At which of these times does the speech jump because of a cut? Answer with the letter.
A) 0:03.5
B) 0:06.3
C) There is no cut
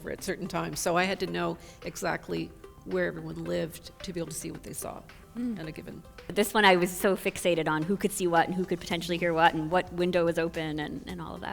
B